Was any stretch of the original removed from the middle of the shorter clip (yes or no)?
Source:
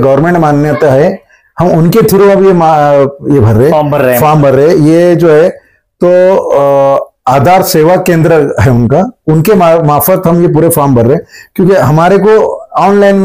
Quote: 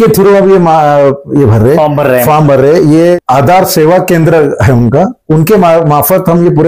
yes